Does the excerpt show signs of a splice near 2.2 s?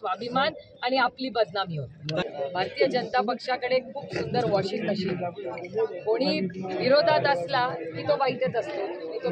yes; 1 cut; at 2.2 s

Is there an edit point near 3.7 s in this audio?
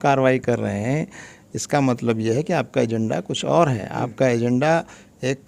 no; 0 cuts

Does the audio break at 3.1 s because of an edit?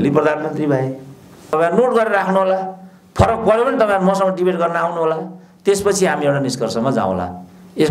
no; 1 cut; at 1.5 s

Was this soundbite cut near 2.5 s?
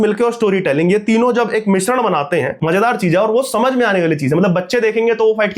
yes; 1 cut; at 2.5 s

